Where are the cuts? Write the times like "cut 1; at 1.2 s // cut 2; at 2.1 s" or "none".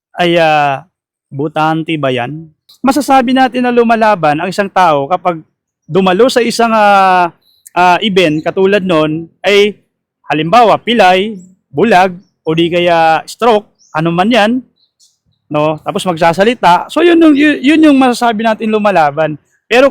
cut 1; at 2.7 s